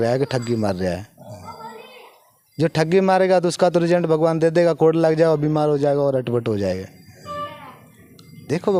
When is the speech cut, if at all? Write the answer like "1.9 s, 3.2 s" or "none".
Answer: none

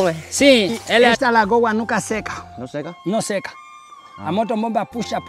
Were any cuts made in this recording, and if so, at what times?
1.1 s

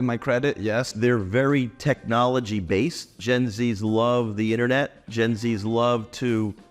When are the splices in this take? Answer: 0.9 s

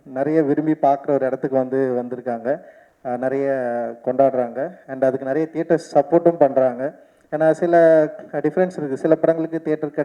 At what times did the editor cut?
none

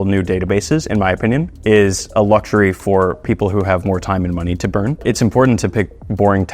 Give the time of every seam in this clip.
5.0 s

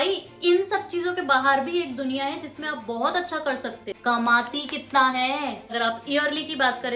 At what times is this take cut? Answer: 3.9 s, 5.7 s

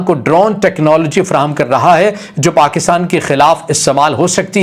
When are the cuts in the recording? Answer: none

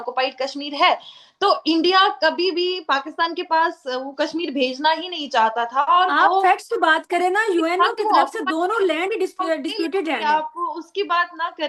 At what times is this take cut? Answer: none

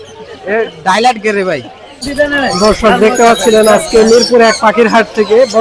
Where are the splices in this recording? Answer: 2.1 s

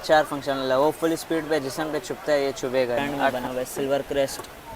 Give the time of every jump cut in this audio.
3.4 s

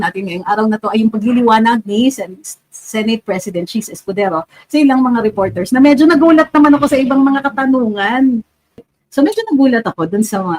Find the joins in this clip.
8.9 s

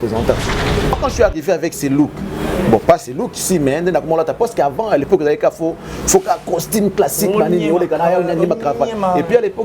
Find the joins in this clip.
1.0 s

